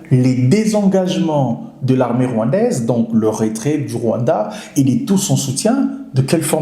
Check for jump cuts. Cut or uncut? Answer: uncut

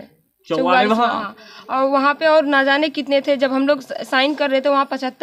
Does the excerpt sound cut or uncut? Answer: uncut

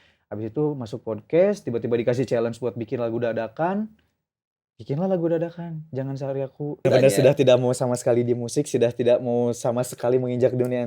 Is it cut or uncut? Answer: cut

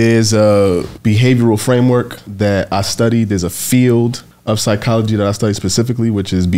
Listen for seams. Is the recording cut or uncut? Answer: cut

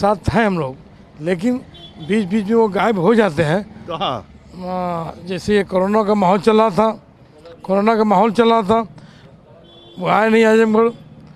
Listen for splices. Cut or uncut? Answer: uncut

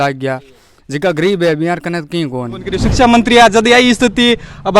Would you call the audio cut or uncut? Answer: cut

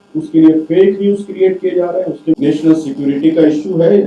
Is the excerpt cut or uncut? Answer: cut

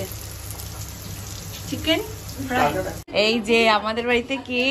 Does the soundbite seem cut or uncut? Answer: cut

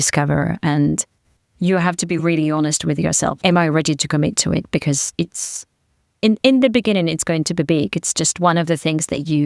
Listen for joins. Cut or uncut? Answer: uncut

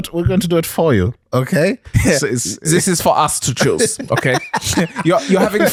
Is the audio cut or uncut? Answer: uncut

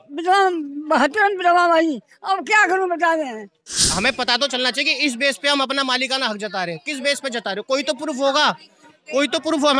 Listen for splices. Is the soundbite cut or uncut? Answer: cut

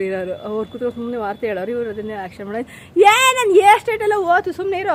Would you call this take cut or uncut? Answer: uncut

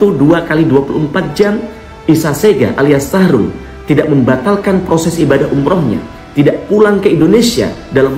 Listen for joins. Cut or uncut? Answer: uncut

